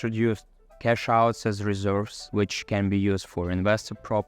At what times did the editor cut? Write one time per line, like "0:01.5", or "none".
0:02.2